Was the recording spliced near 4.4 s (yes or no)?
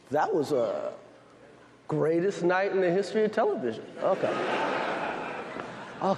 yes